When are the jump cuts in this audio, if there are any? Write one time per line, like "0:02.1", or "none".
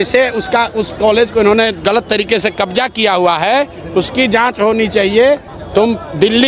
0:05.5